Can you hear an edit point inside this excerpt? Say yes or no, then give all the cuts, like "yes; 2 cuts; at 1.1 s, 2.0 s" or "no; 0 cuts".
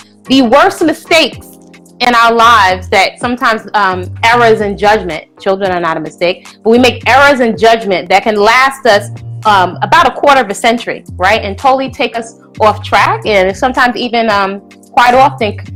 no; 0 cuts